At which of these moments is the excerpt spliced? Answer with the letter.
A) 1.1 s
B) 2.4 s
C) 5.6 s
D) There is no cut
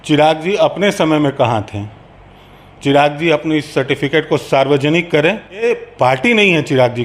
C